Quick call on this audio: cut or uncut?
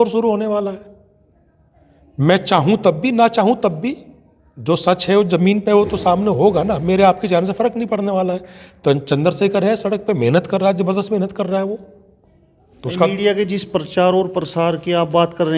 uncut